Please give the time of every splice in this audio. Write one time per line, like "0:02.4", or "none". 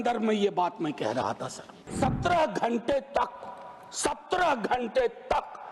0:01.9